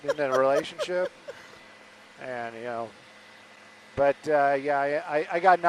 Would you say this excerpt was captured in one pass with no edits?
yes; 0 cuts

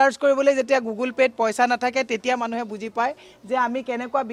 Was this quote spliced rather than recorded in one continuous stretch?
no; 0 cuts

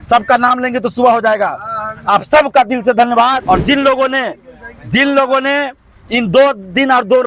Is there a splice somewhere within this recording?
yes; 1 cut; at 3.4 s

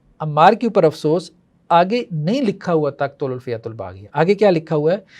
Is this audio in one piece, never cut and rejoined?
yes; 0 cuts

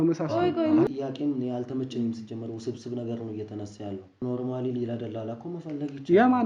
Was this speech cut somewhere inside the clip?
yes; 2 cuts; at 0.9 s, 4.2 s

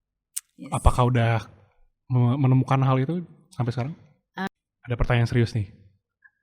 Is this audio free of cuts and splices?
no; 1 cut; at 4.5 s

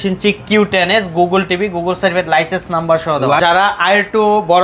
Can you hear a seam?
yes; 1 cut; at 3.4 s

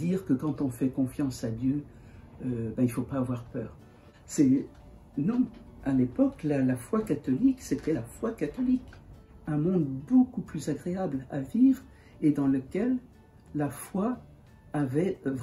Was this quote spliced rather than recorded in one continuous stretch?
yes; 2 cuts; at 3.7 s, 8.9 s

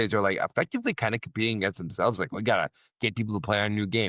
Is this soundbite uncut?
yes; 0 cuts

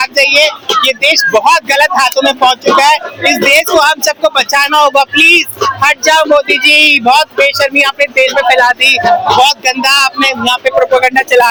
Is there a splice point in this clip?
no; 0 cuts

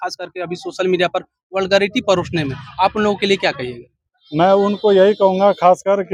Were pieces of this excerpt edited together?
no; 0 cuts

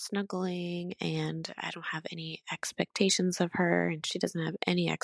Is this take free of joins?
yes; 0 cuts

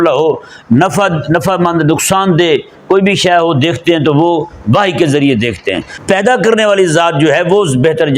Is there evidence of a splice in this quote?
yes; 1 cut; at 5.9 s

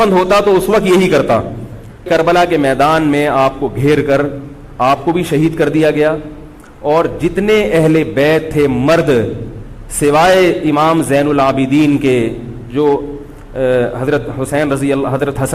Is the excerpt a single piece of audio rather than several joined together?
no; 1 cut; at 2.0 s

